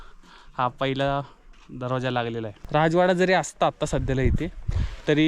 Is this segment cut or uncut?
cut